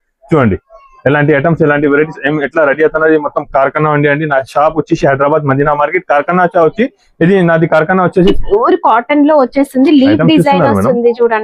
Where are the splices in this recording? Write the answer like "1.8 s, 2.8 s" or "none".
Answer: 8.4 s